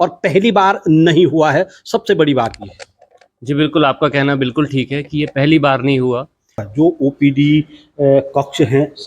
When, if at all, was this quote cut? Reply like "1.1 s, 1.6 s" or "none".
6.6 s